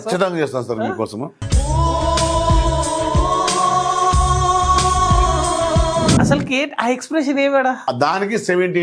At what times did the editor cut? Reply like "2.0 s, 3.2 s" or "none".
6.1 s, 7.8 s